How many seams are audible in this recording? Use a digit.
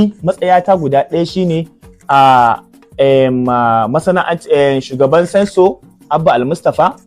0